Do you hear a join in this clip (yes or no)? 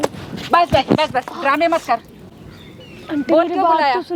no